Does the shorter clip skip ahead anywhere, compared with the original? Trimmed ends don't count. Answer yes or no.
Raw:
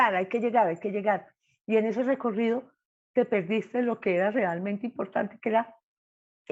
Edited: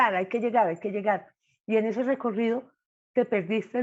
no